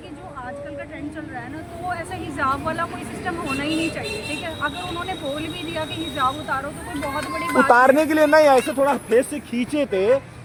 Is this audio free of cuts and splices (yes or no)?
yes